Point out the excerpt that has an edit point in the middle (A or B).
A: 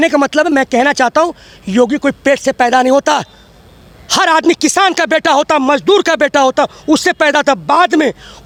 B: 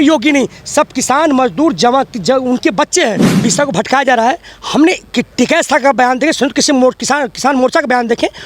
B